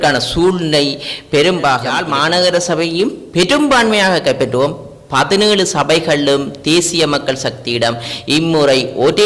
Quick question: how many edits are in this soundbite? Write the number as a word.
one